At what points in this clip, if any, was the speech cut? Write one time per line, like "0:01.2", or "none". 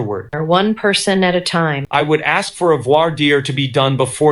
0:01.8